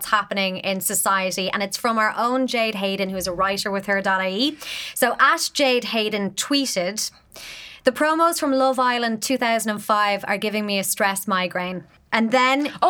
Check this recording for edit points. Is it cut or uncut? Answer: cut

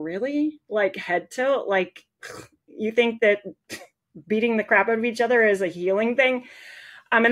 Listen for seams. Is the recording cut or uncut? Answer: uncut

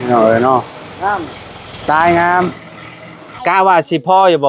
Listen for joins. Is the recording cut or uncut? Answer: cut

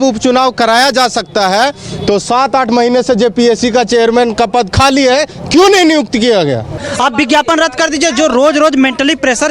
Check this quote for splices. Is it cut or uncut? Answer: cut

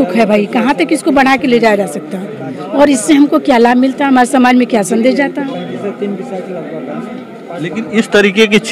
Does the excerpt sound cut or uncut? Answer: uncut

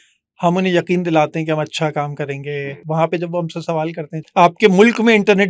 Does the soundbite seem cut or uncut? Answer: cut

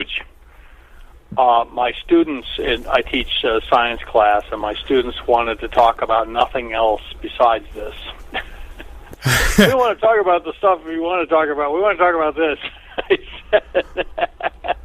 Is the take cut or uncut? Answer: uncut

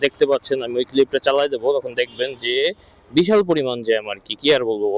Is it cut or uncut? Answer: uncut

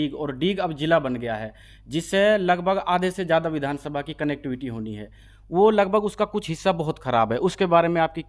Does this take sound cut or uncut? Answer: uncut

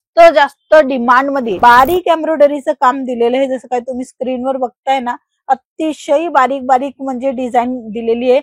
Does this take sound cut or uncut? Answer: cut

